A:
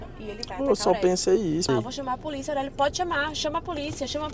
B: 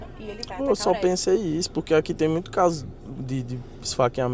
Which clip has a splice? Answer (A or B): A